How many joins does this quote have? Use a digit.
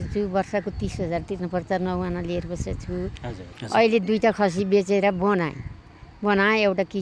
1